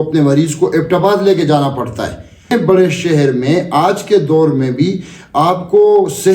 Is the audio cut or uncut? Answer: cut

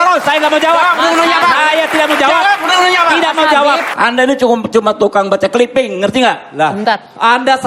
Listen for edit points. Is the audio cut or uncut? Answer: cut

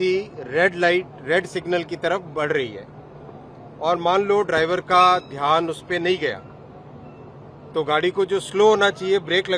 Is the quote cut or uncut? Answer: uncut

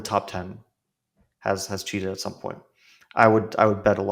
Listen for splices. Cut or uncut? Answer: uncut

